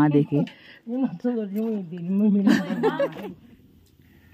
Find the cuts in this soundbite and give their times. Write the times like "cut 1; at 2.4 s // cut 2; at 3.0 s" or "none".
cut 1; at 3.2 s